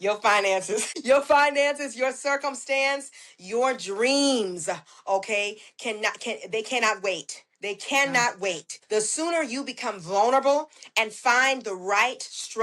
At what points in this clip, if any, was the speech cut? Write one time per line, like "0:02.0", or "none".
0:00.9
0:08.7

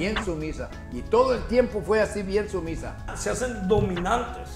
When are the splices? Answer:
0:03.1

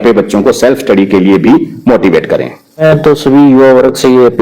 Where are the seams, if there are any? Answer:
0:02.8

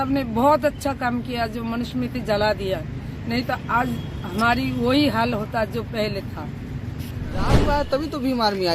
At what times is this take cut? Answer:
0:07.5

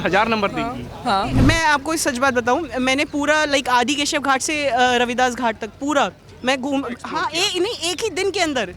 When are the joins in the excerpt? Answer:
0:01.3

